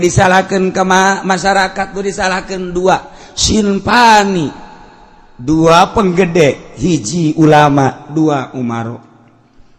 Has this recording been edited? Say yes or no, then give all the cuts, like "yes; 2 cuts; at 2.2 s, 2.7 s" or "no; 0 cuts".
no; 0 cuts